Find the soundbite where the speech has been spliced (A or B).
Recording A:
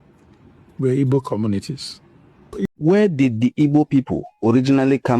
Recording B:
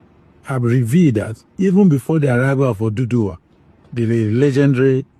A